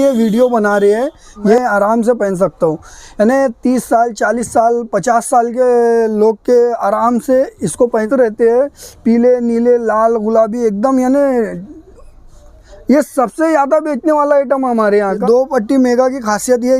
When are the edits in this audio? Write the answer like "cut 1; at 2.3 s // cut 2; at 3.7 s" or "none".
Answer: cut 1; at 1.6 s // cut 2; at 8.1 s // cut 3; at 15.2 s